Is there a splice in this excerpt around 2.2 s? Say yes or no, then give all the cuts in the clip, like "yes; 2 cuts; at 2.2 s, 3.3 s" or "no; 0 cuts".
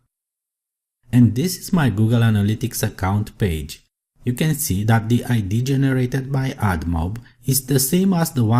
yes; 1 cut; at 2.2 s